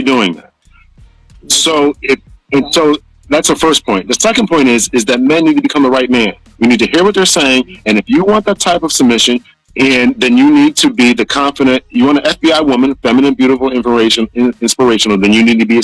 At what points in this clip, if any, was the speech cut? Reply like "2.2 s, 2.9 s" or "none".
9.5 s

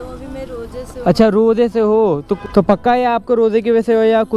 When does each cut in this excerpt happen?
2.3 s

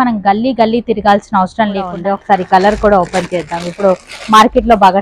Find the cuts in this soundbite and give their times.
2.0 s

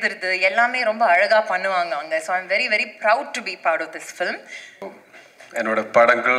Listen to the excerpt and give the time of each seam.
4.8 s

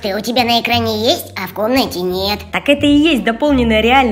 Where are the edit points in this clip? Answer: 2.5 s

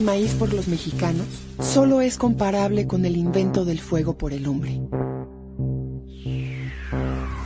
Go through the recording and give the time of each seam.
5.1 s

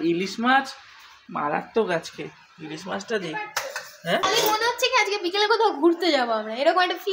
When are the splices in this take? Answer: 4.2 s

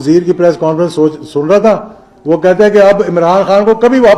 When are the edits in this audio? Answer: none

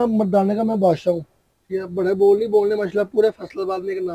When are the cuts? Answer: none

